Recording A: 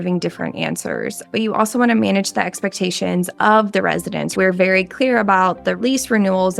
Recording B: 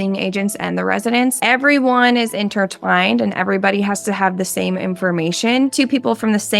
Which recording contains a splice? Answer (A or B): A